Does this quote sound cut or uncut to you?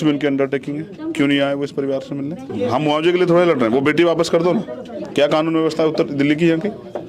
cut